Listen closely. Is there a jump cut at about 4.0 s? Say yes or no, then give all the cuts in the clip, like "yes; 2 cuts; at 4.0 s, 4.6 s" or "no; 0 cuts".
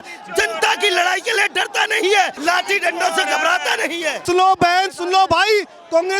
no; 1 cut; at 2.4 s